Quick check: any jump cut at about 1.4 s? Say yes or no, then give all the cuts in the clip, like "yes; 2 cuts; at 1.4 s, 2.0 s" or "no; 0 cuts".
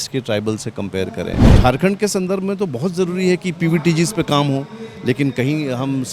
yes; 1 cut; at 1.4 s